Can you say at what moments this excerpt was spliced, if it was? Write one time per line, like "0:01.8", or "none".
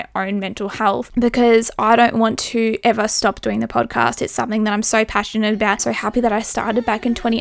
0:01.1
0:05.9

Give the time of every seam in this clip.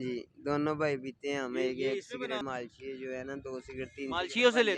0:02.4

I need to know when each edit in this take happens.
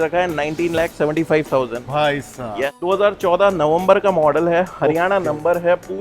0:02.7

